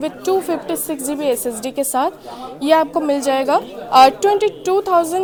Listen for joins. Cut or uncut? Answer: uncut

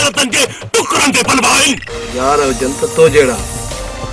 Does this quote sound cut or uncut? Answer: cut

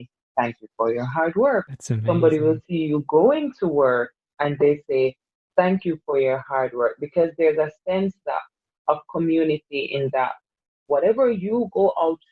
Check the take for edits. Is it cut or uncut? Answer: cut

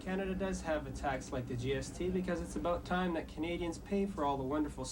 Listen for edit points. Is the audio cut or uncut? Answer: uncut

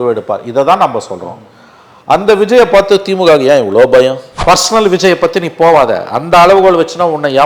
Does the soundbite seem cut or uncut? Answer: cut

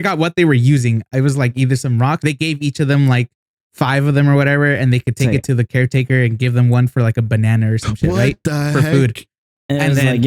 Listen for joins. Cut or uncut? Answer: cut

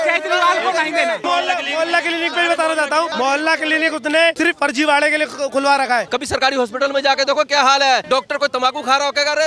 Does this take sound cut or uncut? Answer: cut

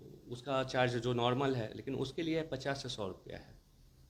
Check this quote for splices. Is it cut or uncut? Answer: uncut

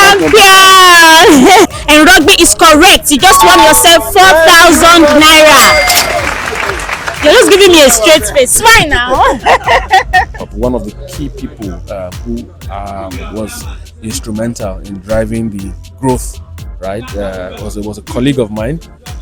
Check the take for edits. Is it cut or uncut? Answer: cut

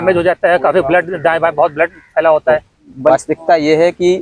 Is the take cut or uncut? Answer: cut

